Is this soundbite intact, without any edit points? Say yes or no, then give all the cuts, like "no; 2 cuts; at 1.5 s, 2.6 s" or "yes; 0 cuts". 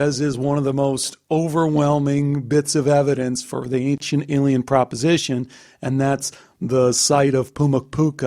no; 1 cut; at 4.0 s